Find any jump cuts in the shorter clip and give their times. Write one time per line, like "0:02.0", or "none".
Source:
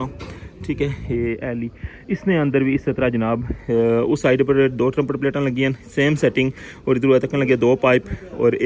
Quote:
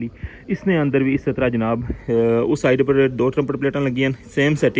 none